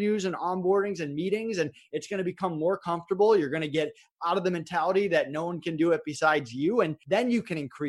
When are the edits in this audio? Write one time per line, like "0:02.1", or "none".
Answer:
0:07.0